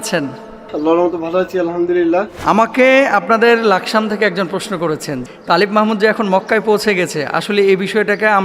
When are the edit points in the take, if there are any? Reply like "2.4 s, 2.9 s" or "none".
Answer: 2.3 s, 5.2 s